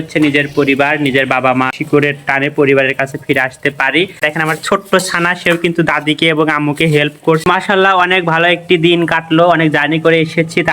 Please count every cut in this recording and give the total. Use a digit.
3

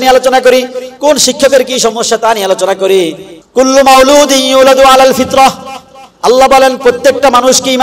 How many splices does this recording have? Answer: 1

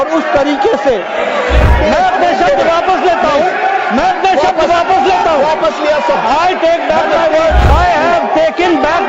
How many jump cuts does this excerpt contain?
2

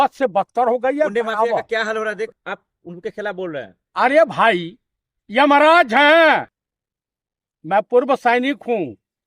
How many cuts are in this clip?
1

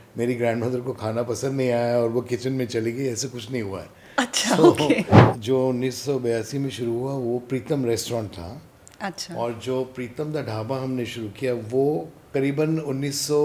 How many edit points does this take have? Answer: 2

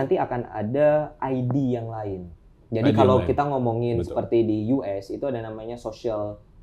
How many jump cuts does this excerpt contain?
0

